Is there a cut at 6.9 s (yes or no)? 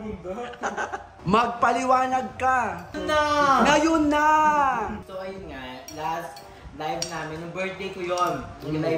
no